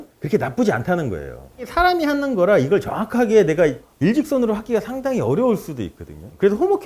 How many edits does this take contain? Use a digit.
0